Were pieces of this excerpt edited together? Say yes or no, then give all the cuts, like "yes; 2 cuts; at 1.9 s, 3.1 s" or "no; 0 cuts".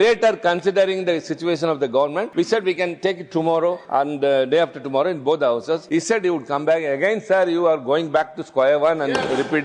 yes; 3 cuts; at 2.3 s, 3.8 s, 5.8 s